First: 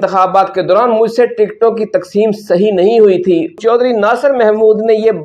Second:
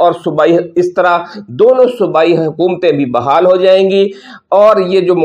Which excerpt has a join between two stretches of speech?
first; 1 cut; at 3.6 s

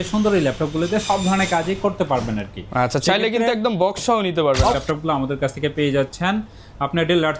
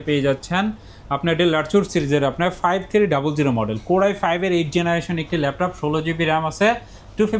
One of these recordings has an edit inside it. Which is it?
first; 1 cut; at 4.7 s

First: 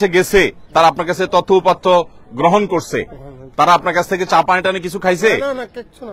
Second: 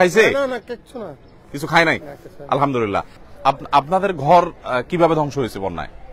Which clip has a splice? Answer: second; 1 cut; at 3.2 s

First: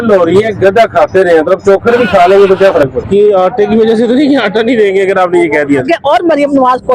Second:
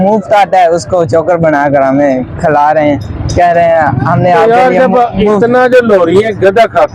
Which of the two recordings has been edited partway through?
first; 2 cuts; at 3.0 s, 5.8 s

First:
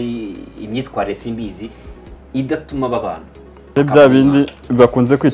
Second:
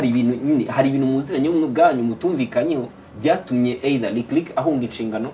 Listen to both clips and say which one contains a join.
first; 1 cut; at 3.8 s

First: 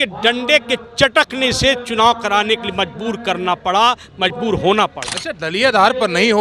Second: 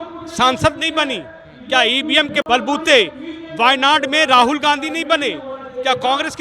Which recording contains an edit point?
second; 1 cut; at 2.5 s

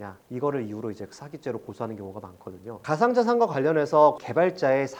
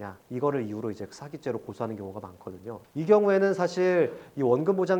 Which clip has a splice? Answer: first; 1 cut; at 2.7 s

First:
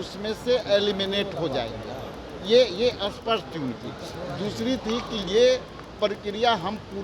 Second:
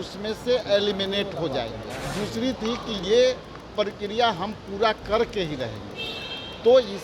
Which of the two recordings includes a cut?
second; 1 cut; at 2.0 s

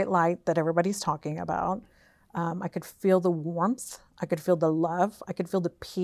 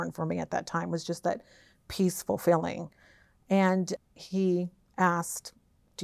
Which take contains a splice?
second; 1 cut; at 4.0 s

